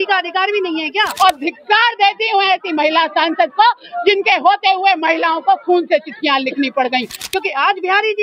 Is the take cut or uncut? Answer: cut